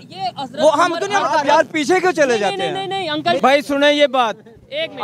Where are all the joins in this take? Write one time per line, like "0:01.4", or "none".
0:03.4